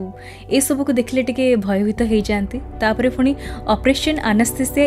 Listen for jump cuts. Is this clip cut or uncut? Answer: uncut